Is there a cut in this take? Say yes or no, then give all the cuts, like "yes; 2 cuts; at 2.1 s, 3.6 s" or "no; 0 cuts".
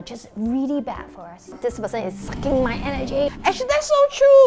yes; 2 cuts; at 1.5 s, 3.3 s